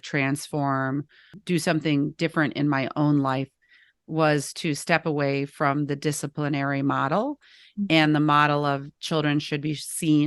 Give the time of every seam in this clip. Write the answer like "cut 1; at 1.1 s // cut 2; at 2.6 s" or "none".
cut 1; at 1.3 s